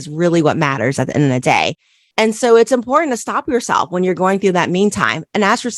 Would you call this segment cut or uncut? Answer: uncut